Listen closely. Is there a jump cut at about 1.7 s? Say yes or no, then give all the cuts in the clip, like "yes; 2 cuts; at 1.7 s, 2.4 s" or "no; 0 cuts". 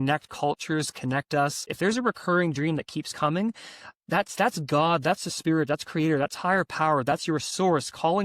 yes; 1 cut; at 1.7 s